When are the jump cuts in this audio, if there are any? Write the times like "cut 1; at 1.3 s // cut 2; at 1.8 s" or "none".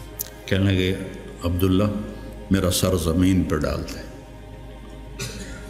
none